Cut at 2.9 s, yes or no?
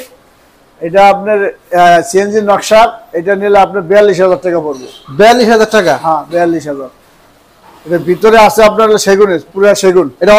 no